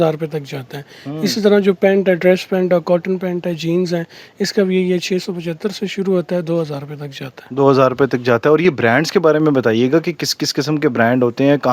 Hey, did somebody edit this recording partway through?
no; 0 cuts

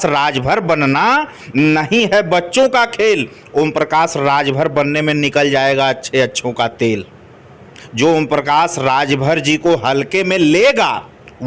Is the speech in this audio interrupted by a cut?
no; 0 cuts

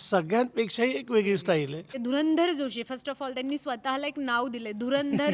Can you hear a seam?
yes; 1 cut; at 2.0 s

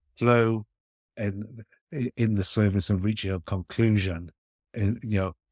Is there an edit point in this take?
no; 0 cuts

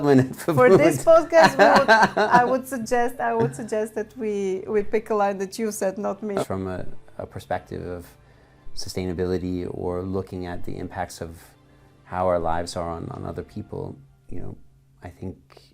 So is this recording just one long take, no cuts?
no; 1 cut; at 6.4 s

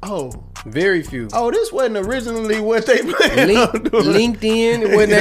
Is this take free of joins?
yes; 0 cuts

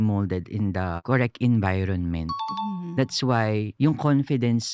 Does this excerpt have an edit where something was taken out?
yes; 1 cut; at 1.0 s

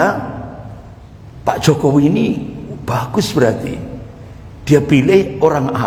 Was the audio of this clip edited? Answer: no; 0 cuts

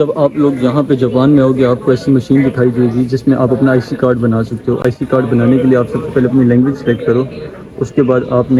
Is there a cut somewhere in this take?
no; 0 cuts

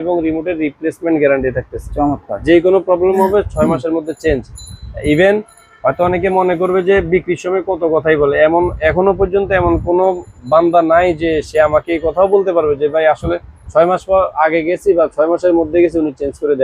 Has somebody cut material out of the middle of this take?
no; 0 cuts

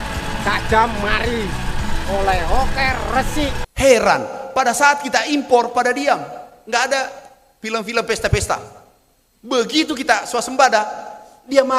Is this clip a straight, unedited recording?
no; 1 cut; at 3.6 s

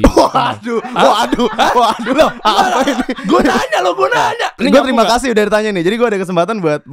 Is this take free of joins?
no; 1 cut; at 4.6 s

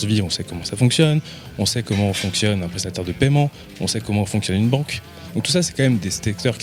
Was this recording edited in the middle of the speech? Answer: no; 0 cuts

